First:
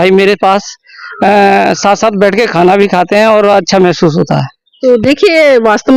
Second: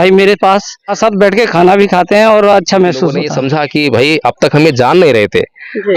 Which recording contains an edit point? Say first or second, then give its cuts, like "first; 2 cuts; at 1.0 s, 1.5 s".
second; 2 cuts; at 0.9 s, 3.3 s